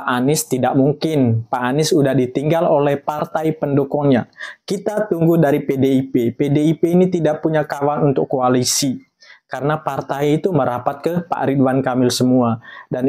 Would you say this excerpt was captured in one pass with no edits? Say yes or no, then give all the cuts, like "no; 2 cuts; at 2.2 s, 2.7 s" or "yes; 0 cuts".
yes; 0 cuts